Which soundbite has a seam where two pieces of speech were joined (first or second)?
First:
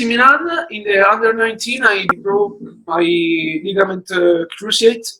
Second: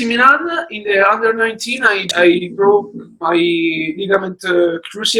first